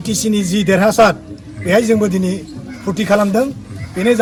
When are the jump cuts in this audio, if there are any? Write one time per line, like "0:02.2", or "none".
none